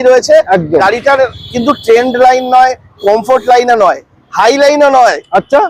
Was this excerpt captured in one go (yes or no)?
yes